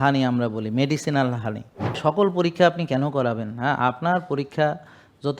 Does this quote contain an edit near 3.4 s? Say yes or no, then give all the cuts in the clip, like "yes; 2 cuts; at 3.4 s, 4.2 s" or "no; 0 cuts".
no; 1 cut; at 2.0 s